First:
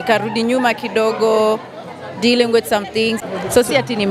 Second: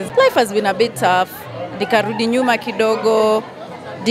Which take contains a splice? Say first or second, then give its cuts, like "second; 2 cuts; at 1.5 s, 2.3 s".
first; 1 cut; at 3.2 s